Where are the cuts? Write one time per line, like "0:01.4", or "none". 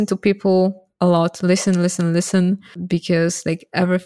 0:02.7